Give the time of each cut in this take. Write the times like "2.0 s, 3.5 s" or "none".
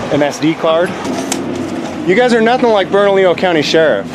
1.0 s